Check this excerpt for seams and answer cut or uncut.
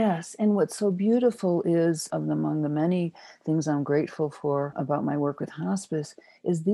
cut